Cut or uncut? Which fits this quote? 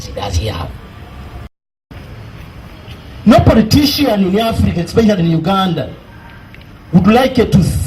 cut